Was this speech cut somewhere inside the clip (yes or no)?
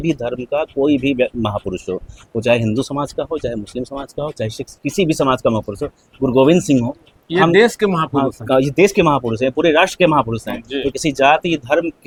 no